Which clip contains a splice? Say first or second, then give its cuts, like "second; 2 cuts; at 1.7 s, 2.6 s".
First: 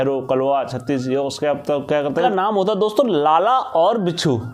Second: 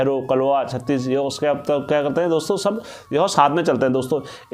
first; 1 cut; at 2.2 s